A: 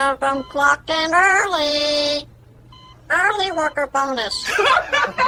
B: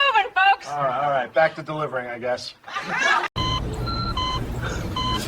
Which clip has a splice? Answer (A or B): B